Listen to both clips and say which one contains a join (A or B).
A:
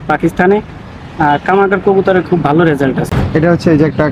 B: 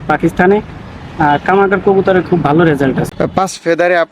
B